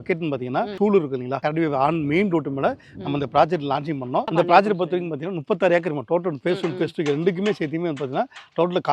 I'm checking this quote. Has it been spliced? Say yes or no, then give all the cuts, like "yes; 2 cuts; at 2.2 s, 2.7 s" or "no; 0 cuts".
yes; 2 cuts; at 1.1 s, 4.3 s